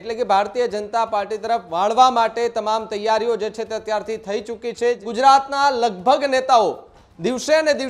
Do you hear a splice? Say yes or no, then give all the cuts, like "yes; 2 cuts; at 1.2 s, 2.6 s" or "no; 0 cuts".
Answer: yes; 1 cut; at 5.0 s